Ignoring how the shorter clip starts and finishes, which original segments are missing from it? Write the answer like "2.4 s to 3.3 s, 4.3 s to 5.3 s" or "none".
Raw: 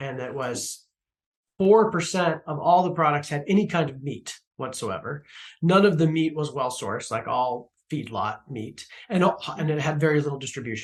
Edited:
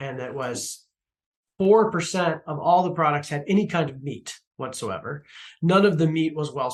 none